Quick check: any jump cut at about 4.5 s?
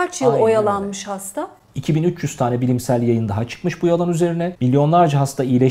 yes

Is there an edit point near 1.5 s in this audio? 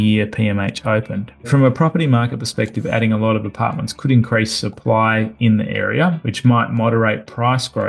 yes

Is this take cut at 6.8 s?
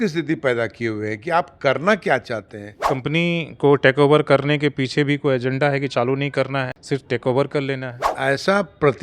yes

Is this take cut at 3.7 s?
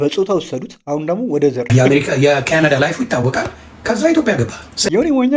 no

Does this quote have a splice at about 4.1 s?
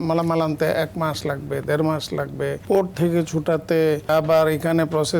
yes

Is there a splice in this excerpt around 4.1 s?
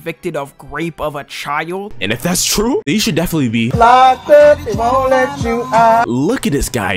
no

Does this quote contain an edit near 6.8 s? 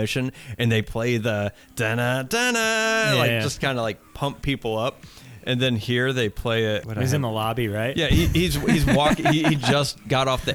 yes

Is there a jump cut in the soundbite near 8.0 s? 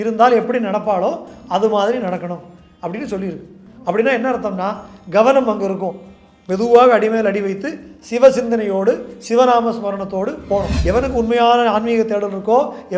no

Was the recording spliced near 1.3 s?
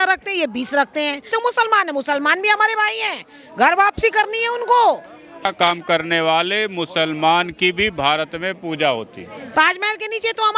yes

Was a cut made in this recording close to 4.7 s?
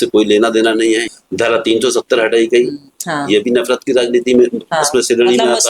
no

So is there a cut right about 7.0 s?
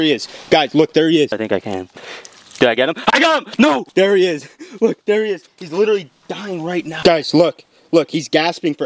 yes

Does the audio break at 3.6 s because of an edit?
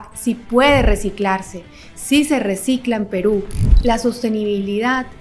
yes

